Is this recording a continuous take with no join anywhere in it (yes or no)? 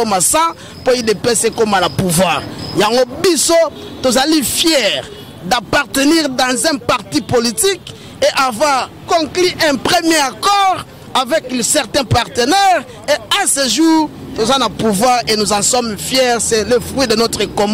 yes